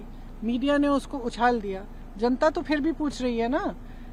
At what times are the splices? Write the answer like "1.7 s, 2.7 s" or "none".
none